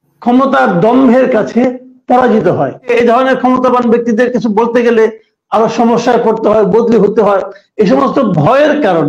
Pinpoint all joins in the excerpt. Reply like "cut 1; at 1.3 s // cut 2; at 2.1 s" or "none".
cut 1; at 2.9 s